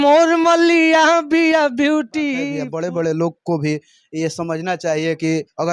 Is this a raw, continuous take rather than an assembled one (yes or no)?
no